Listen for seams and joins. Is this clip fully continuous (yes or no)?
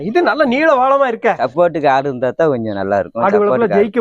no